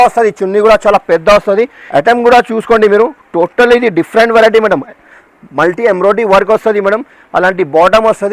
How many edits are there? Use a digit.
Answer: 1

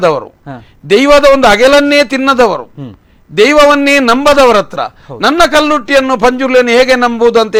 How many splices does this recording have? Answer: 0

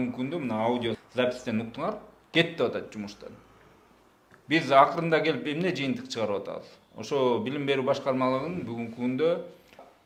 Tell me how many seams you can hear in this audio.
0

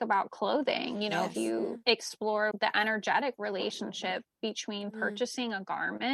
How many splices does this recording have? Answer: 1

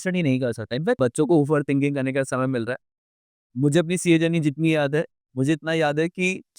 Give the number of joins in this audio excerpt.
1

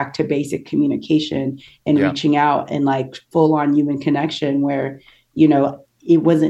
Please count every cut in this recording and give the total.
0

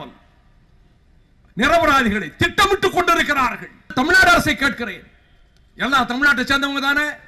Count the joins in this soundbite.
1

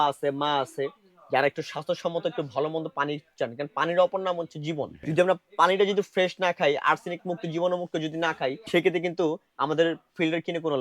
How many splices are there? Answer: 2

